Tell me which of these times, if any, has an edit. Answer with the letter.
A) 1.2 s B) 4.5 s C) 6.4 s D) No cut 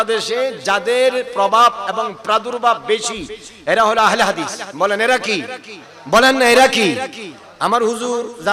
D